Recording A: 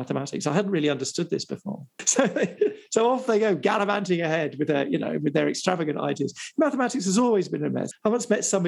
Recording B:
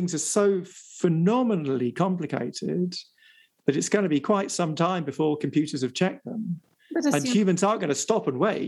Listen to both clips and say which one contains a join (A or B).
A